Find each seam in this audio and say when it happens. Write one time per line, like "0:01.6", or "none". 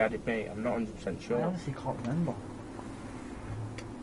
0:01.5